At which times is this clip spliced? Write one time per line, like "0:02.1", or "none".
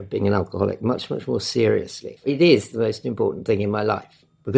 0:02.2